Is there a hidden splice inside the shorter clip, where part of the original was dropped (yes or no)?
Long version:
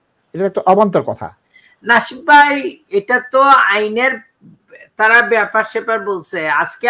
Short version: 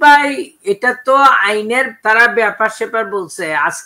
yes